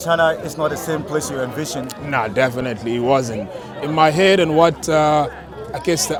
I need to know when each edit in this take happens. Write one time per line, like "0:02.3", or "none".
none